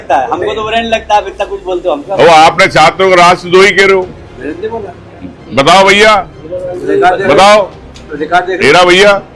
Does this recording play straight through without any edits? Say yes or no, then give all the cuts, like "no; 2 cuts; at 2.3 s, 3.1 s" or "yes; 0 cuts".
yes; 0 cuts